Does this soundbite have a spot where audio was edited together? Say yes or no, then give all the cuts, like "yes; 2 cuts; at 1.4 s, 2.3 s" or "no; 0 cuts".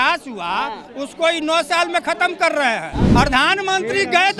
yes; 1 cut; at 3.0 s